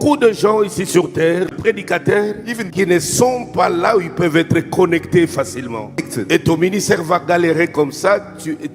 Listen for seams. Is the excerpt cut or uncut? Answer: cut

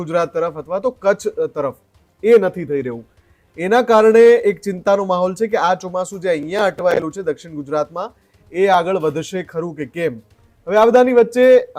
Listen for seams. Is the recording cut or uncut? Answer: uncut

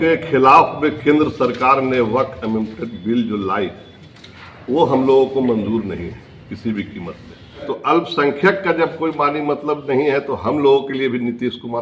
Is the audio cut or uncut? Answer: cut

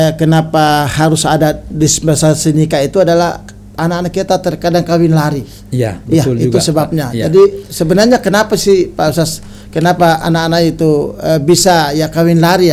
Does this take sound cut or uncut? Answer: uncut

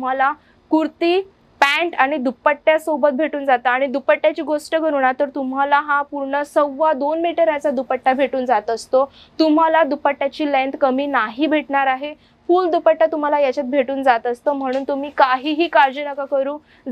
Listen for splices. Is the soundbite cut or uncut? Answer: uncut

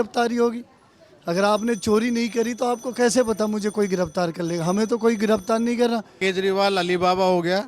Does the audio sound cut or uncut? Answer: cut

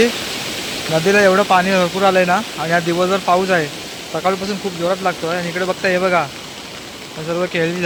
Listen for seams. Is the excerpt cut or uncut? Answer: uncut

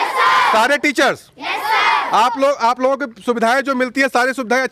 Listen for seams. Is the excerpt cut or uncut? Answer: uncut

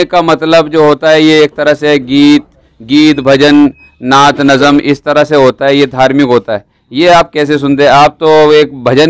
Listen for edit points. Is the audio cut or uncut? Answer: uncut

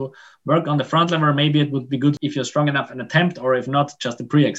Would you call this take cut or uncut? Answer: cut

